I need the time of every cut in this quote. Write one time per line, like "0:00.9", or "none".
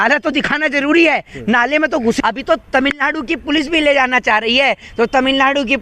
0:02.2